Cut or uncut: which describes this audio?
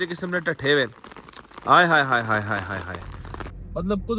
cut